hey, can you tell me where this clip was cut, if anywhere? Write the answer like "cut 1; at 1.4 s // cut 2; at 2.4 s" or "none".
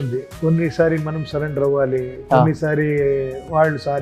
none